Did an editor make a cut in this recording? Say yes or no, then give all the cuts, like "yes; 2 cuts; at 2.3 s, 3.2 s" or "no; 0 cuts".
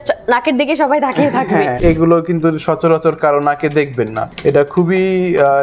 yes; 2 cuts; at 1.8 s, 4.3 s